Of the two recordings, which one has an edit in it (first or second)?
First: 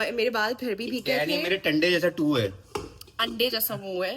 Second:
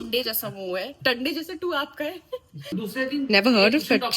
second